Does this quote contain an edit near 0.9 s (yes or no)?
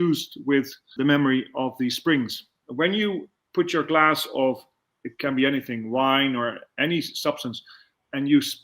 yes